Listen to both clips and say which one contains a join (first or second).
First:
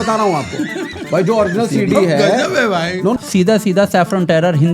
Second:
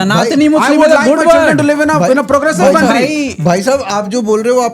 first